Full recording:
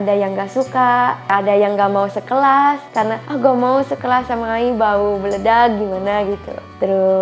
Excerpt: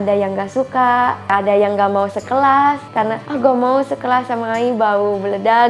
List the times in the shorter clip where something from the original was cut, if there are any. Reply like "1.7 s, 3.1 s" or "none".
none

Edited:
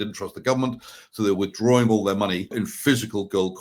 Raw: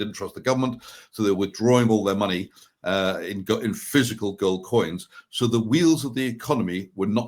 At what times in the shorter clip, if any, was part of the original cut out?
2.5 s

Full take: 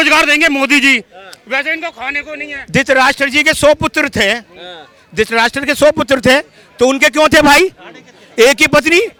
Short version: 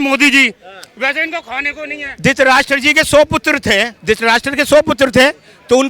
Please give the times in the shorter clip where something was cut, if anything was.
3.9 s

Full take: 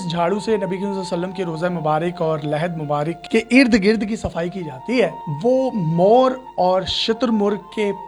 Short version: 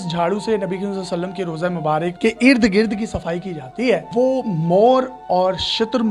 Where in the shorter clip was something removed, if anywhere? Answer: 2.1 s, 4.1 s

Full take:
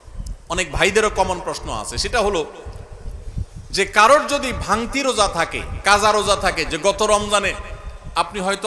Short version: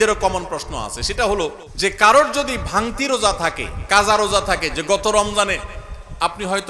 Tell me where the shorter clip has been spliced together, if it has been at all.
1.7 s

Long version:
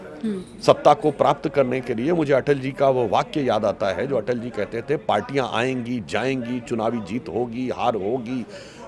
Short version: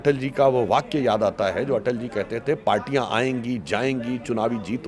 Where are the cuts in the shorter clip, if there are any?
none

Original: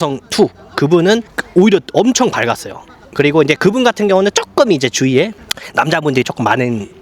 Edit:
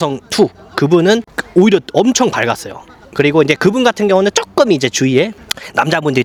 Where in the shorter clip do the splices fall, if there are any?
none

